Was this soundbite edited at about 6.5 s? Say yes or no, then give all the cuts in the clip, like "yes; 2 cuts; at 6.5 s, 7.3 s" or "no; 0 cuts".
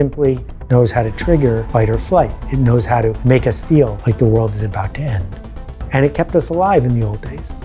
no; 3 cuts; at 1.6 s, 3.2 s, 4.0 s